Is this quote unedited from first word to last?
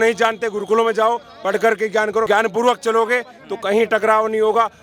no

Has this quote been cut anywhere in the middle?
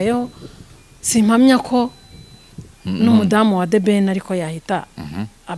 no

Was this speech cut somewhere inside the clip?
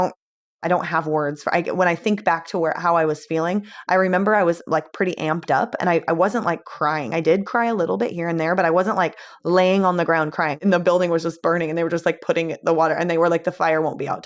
no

